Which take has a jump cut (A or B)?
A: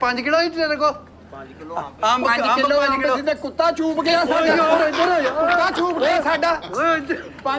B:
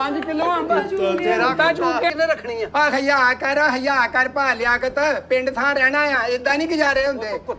B